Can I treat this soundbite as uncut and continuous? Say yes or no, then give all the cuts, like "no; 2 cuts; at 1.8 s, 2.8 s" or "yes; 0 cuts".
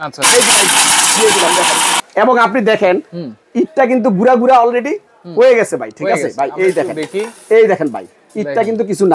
no; 1 cut; at 1.9 s